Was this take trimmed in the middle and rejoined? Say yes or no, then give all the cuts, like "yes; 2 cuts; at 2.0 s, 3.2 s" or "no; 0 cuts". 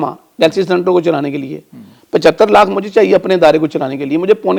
no; 0 cuts